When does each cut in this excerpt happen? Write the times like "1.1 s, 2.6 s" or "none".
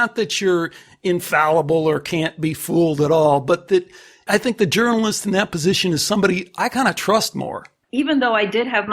4.3 s, 7.8 s